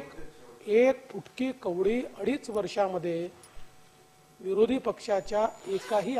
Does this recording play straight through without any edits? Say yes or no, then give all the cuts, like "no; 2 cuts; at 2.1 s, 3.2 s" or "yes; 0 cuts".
yes; 0 cuts